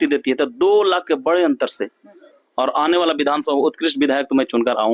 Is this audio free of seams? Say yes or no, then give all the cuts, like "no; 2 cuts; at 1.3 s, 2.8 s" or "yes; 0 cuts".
yes; 0 cuts